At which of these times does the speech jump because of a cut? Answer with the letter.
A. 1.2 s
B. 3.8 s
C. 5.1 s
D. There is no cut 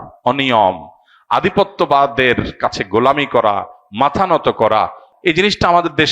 C